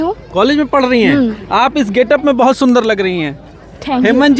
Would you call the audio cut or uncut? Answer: uncut